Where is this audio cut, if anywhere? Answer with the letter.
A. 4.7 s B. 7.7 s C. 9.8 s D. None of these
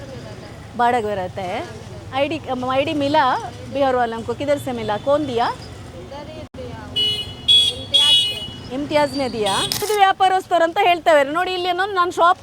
C